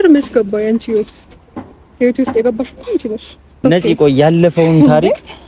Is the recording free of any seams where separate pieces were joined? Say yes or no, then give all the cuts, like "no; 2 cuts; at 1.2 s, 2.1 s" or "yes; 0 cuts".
no; 1 cut; at 3.6 s